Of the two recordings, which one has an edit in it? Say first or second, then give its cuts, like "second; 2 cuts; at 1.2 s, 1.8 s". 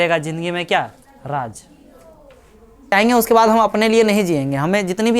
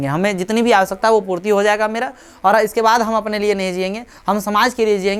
first; 1 cut; at 2.9 s